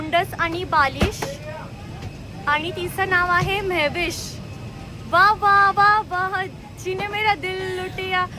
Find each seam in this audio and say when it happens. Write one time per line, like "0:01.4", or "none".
none